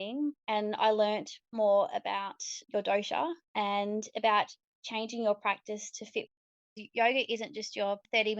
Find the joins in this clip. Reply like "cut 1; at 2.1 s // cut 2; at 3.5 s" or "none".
cut 1; at 6.4 s